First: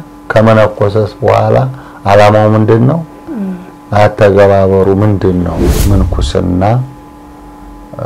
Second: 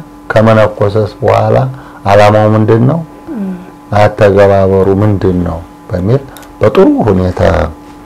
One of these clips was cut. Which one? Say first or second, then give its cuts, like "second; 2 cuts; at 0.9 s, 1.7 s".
first; 1 cut; at 5.7 s